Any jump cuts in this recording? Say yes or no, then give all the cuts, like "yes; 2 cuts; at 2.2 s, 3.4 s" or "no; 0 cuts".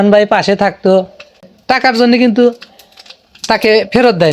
yes; 1 cut; at 1.5 s